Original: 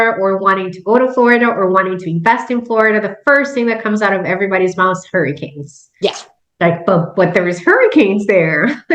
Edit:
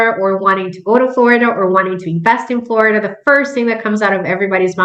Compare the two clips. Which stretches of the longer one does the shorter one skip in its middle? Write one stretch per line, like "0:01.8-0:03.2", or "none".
none